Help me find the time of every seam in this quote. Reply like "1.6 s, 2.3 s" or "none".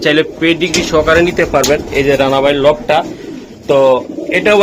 none